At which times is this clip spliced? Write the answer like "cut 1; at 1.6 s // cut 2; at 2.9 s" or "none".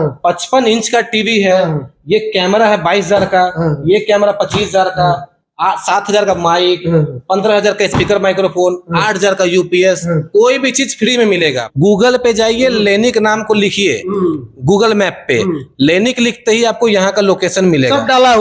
cut 1; at 11.6 s